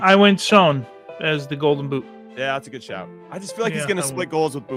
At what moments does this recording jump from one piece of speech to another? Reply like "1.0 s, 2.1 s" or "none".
none